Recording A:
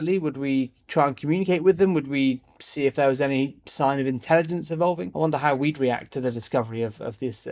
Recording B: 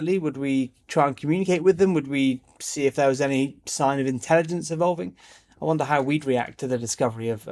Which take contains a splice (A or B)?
A